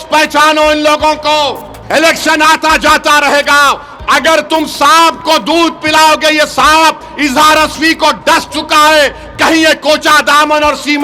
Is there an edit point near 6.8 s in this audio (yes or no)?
no